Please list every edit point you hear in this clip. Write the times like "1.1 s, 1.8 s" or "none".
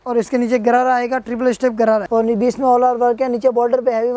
2.1 s